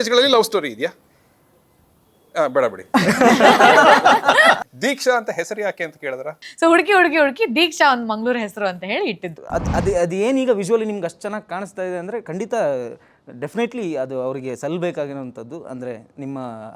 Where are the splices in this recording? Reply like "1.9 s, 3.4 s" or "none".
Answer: 4.6 s, 6.4 s, 9.3 s